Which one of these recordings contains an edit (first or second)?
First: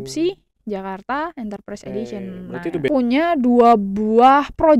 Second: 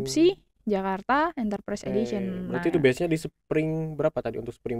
first